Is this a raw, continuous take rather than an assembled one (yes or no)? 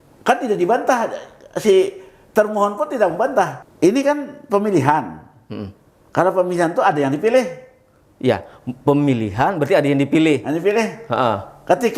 no